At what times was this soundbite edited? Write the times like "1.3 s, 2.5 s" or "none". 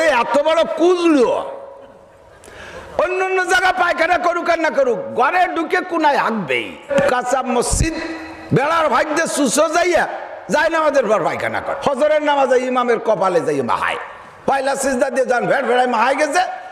6.9 s, 11.7 s